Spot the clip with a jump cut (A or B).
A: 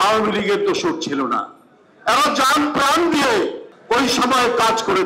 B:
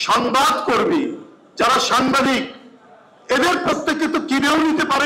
A